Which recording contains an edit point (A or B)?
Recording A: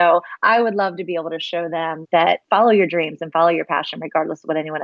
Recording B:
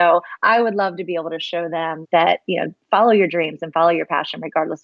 A